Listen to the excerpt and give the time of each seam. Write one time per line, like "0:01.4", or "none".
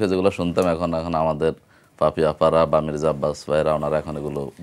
none